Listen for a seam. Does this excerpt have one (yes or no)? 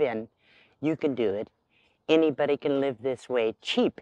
no